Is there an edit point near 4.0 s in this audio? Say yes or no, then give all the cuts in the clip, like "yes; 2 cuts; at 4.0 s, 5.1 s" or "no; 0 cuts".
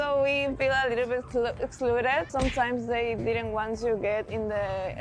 no; 1 cut; at 2.3 s